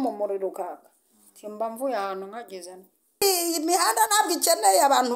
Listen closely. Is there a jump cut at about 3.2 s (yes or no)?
yes